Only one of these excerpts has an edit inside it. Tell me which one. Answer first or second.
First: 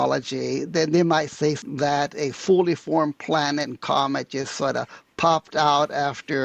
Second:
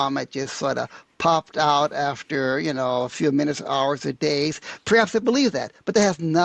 first